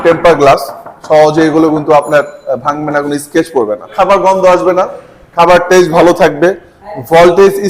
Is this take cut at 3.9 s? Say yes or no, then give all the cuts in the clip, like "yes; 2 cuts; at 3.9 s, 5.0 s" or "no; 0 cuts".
yes; 1 cut; at 3.9 s